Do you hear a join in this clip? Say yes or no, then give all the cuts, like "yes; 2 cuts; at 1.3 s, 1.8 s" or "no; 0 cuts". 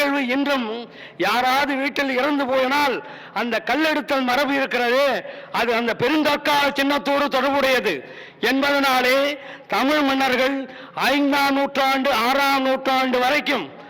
no; 0 cuts